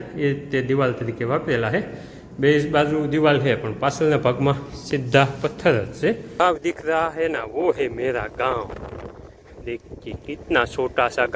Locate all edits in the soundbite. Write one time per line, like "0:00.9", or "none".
0:06.4